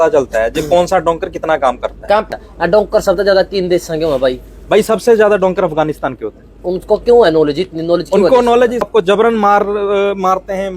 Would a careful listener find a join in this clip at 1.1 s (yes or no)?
no